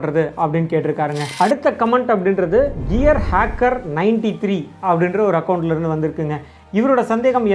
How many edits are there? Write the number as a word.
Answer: two